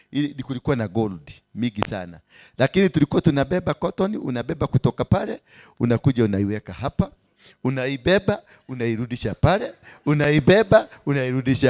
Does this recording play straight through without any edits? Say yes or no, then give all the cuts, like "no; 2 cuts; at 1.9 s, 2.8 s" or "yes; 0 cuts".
yes; 0 cuts